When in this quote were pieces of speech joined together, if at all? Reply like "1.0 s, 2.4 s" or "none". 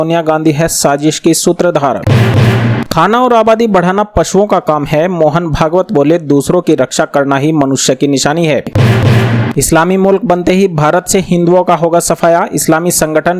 2.0 s, 8.7 s